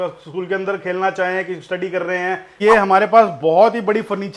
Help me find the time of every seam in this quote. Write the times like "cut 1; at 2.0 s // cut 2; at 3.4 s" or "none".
cut 1; at 2.6 s